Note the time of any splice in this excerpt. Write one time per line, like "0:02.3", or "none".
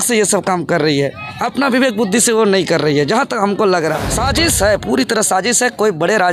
0:04.1